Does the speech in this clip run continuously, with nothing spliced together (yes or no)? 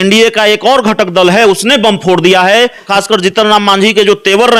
no